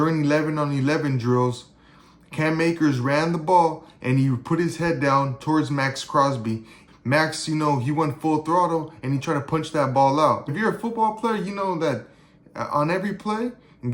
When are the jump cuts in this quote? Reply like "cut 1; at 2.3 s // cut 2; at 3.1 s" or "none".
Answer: cut 1; at 6.8 s // cut 2; at 10.5 s